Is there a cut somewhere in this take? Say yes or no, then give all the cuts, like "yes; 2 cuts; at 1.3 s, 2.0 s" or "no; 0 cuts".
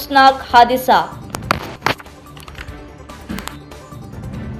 no; 0 cuts